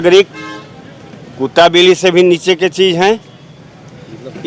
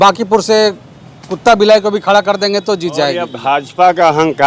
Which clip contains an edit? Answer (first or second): second